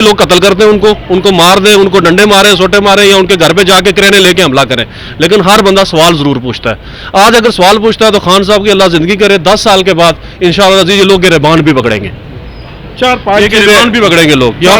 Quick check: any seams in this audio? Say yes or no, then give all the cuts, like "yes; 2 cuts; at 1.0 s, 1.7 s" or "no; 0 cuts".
no; 0 cuts